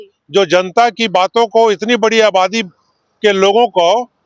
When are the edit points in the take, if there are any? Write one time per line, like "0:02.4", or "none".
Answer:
none